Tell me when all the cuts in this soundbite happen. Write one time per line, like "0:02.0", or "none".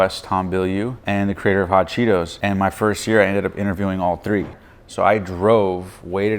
0:01.0
0:02.3
0:04.6